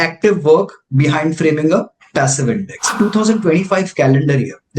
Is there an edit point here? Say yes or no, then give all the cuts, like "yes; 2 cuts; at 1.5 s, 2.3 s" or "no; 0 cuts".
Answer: yes; 1 cut; at 3.0 s